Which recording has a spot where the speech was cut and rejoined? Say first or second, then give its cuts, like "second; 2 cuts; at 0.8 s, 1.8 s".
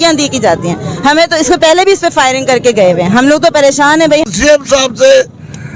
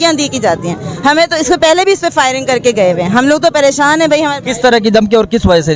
first; 1 cut; at 4.3 s